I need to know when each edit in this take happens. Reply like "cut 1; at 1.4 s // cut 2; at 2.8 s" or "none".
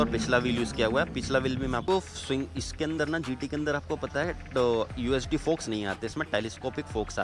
cut 1; at 1.9 s